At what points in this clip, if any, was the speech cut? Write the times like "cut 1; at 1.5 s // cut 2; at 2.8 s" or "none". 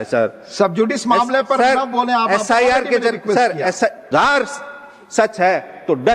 cut 1; at 4.0 s